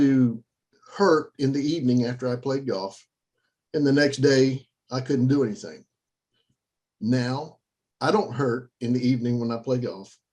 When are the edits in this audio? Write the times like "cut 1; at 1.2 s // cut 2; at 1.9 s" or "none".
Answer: none